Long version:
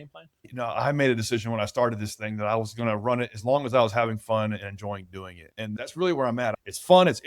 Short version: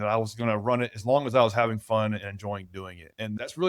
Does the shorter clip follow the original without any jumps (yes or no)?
yes